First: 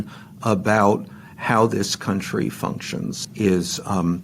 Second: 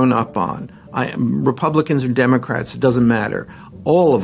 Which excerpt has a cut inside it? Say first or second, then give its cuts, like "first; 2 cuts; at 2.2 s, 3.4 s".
first; 1 cut; at 3.2 s